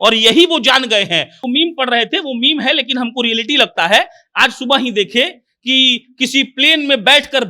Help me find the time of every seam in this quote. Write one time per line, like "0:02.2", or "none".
0:01.4